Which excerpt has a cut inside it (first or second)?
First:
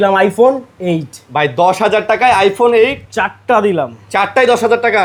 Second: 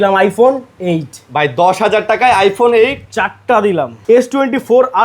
second